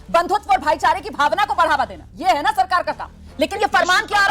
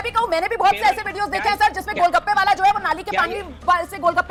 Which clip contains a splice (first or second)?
first